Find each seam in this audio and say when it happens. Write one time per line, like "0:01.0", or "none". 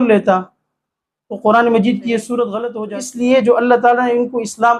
0:02.6